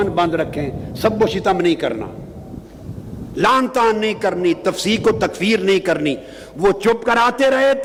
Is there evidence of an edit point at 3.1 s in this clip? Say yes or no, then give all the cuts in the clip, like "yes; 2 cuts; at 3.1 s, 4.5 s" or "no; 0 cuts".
no; 0 cuts